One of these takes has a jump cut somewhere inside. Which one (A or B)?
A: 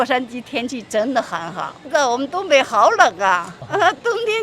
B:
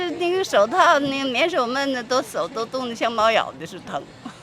A